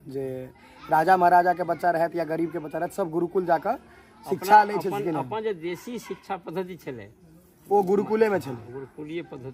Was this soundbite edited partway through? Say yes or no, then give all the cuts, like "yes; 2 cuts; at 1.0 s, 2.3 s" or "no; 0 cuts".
no; 0 cuts